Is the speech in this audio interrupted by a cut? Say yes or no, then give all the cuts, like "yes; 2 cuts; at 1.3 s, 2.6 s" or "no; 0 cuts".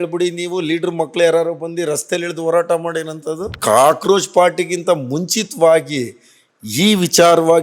yes; 1 cut; at 3.6 s